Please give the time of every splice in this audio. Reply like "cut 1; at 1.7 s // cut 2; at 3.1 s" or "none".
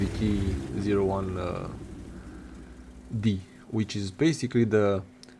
none